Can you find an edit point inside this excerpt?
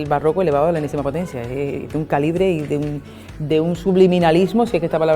no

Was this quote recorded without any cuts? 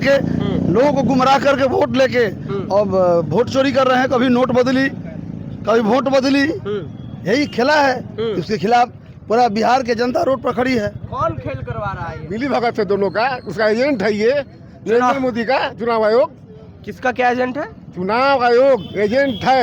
no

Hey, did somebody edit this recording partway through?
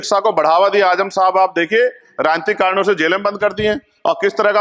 no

